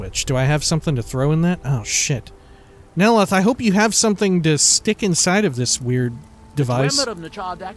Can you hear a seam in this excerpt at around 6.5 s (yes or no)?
no